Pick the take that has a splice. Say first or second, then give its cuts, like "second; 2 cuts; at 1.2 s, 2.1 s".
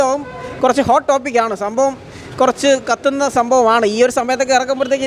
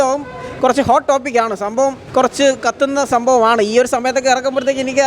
second; 1 cut; at 2.0 s